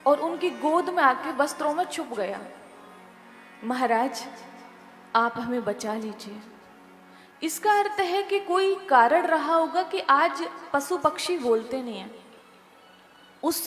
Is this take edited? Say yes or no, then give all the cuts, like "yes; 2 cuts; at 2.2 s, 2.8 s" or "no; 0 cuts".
yes; 1 cut; at 5.8 s